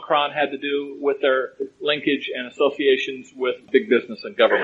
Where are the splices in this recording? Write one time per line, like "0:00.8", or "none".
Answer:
0:03.7